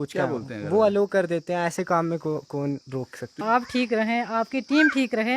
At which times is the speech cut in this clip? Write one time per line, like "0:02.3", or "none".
0:03.4

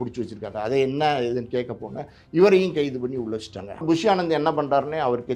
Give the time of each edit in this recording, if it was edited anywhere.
0:03.7

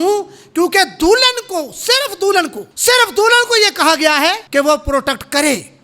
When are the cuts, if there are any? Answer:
0:02.6
0:04.4

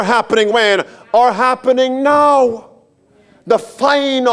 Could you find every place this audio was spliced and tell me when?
none

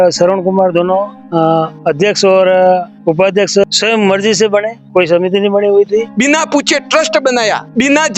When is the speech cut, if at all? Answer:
0:06.1

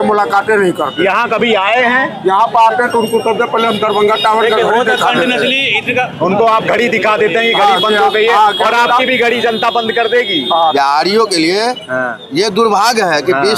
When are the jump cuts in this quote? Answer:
0:10.7

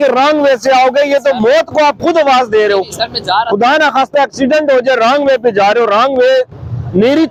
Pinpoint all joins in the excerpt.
none

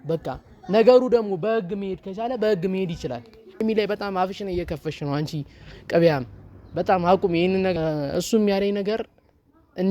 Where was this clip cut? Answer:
0:03.6
0:07.7

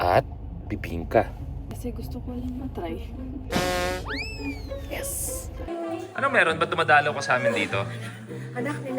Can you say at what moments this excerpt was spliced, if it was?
0:03.5
0:05.7

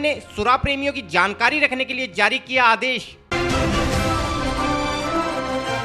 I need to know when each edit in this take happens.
none

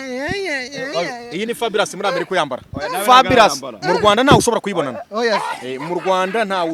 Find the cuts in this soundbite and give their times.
none

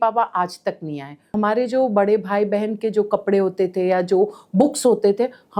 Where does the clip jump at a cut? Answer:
0:01.3

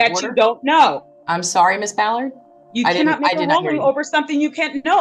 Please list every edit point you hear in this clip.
none

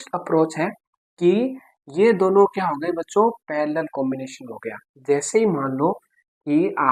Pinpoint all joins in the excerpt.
none

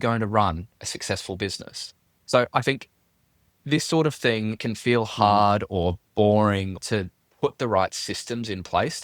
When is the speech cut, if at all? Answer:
0:04.6
0:06.8

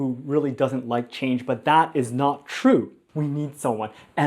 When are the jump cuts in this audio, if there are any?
0:03.0

